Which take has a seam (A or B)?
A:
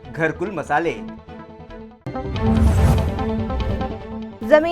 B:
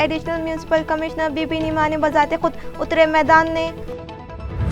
A